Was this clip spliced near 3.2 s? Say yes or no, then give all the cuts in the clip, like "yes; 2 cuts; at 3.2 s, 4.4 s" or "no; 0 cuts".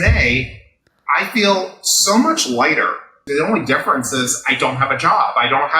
yes; 1 cut; at 3.2 s